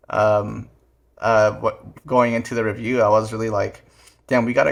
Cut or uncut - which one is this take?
uncut